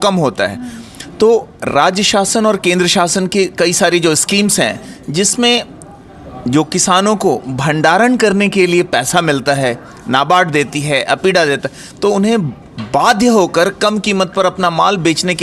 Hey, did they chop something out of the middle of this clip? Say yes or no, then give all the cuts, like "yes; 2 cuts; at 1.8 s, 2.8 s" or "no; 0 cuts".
no; 0 cuts